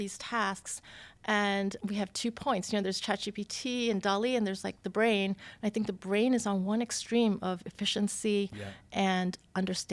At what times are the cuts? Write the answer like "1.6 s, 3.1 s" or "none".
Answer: 1.8 s

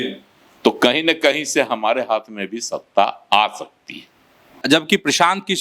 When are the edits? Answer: 4.6 s

